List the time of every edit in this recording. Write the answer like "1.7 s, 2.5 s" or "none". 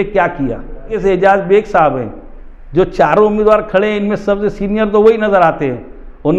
1.0 s